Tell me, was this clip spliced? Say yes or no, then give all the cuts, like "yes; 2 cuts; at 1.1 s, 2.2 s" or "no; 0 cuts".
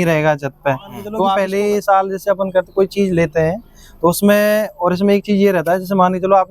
yes; 1 cut; at 1.3 s